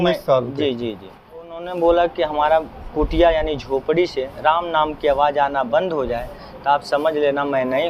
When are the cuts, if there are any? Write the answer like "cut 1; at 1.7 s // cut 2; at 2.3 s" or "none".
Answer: cut 1; at 1.6 s

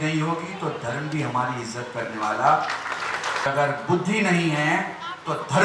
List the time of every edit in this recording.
cut 1; at 3.5 s

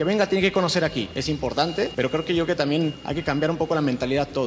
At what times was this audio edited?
cut 1; at 1.6 s // cut 2; at 3.1 s

